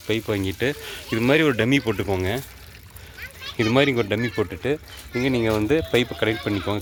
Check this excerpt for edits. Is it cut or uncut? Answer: uncut